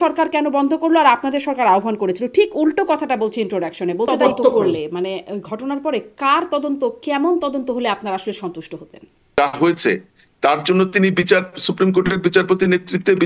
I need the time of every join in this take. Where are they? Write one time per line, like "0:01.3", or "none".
0:04.1
0:09.4